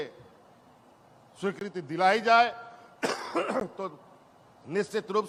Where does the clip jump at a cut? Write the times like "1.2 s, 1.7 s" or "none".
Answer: none